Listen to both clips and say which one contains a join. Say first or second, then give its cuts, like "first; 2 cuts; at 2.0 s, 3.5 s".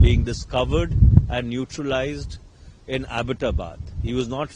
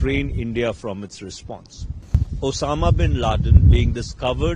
second; 1 cut; at 2.2 s